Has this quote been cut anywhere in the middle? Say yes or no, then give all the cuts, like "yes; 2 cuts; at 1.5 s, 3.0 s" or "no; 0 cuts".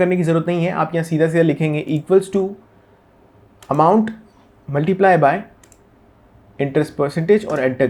no; 0 cuts